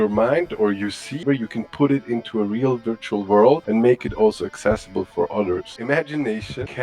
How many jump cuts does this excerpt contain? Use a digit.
2